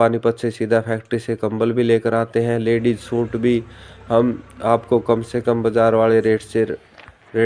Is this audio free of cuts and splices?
yes; 0 cuts

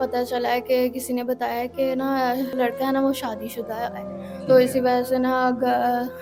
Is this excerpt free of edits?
yes; 0 cuts

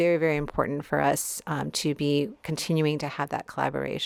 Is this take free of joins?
yes; 0 cuts

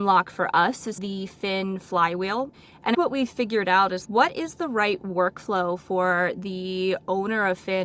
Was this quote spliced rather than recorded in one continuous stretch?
yes; 2 cuts; at 1.0 s, 2.7 s

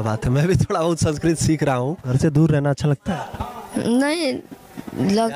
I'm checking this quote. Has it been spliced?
yes; 1 cut; at 2.1 s

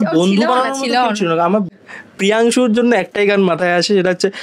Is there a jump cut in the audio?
yes; 1 cut; at 1.8 s

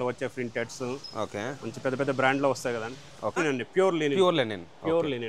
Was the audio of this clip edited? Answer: yes; 1 cut; at 3.4 s

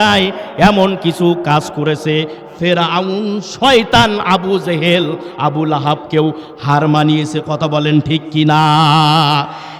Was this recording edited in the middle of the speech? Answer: no; 0 cuts

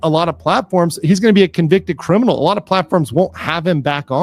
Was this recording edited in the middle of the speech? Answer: no; 0 cuts

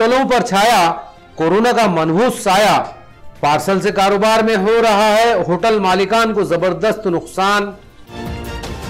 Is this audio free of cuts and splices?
yes; 0 cuts

